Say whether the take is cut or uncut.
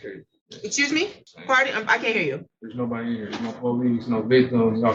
uncut